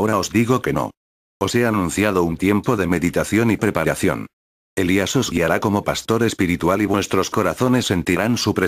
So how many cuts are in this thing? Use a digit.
0